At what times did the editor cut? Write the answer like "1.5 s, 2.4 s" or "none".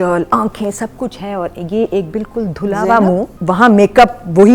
3.3 s